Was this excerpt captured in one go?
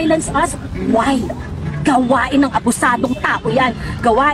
yes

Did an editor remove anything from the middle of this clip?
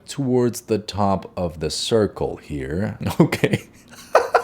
yes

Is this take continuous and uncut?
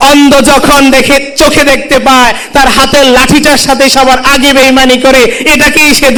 yes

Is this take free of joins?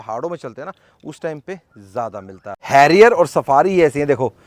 no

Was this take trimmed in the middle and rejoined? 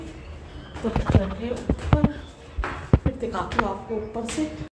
no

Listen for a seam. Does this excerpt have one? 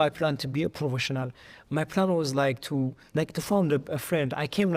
yes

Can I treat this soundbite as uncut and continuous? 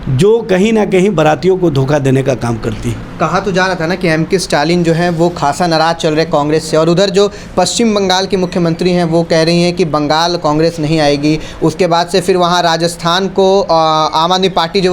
yes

